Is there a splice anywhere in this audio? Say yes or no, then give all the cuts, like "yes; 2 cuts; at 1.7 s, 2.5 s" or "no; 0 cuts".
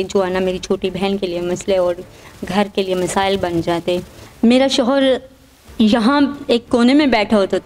yes; 1 cut; at 4.2 s